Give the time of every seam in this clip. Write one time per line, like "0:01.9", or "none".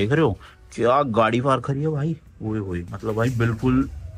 none